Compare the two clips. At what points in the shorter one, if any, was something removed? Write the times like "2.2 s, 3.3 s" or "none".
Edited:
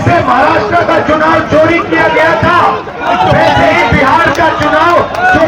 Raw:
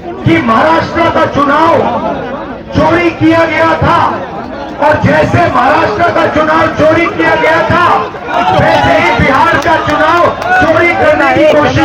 none